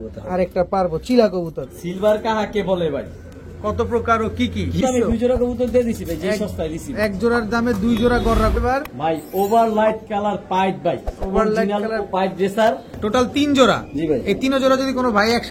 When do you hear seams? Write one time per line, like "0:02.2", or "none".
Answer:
0:01.7
0:04.8
0:08.6
0:12.9